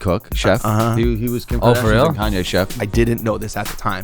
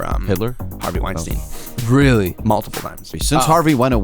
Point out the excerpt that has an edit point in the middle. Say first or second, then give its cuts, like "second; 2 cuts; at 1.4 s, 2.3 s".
second; 1 cut; at 3.1 s